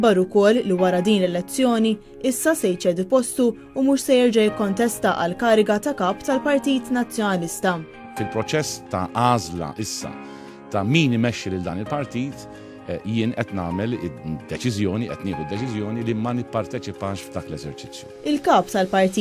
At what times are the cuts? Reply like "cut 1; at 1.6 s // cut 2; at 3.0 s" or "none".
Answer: cut 1; at 5.7 s